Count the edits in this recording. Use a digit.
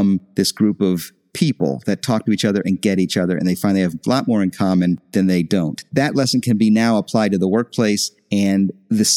0